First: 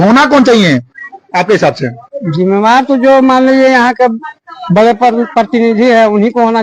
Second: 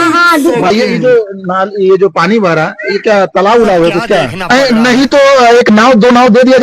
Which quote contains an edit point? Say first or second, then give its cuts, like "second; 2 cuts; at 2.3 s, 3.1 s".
second; 2 cuts; at 0.7 s, 4.5 s